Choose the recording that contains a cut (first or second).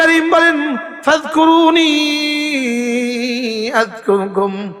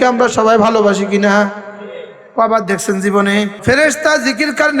second